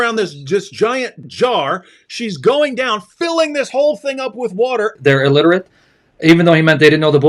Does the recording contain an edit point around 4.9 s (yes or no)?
yes